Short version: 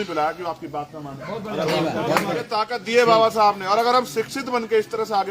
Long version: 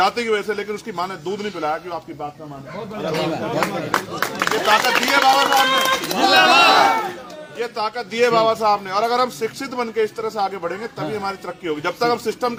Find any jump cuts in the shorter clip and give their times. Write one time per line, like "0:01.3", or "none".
0:02.3